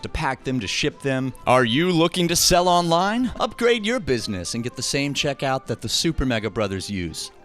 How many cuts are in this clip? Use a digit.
2